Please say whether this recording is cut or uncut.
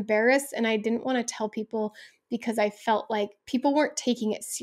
uncut